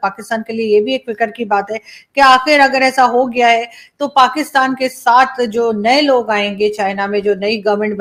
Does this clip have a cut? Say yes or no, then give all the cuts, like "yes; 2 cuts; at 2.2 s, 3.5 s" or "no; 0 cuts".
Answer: no; 0 cuts